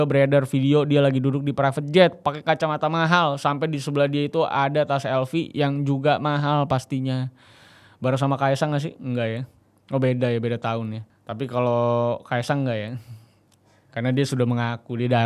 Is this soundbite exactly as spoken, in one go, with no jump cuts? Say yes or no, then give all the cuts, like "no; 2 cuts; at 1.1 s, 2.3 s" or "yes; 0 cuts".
no; 1 cut; at 11.0 s